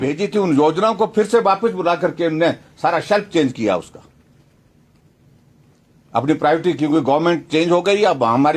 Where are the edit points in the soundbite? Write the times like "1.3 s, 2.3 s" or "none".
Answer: none